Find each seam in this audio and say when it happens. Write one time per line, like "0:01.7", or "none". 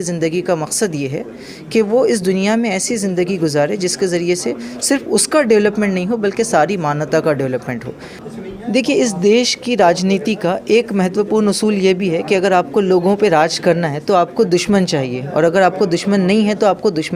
0:08.1